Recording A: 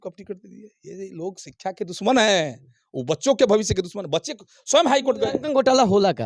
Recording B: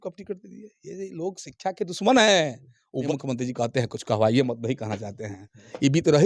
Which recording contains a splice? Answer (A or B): B